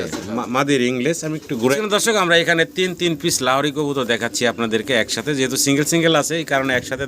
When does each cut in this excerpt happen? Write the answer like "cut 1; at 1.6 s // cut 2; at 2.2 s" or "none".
cut 1; at 1.7 s